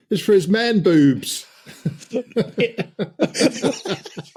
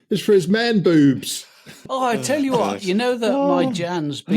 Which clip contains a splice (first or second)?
second